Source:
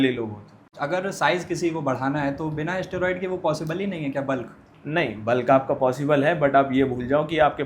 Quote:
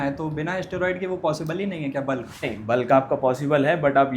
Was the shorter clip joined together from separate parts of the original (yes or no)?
yes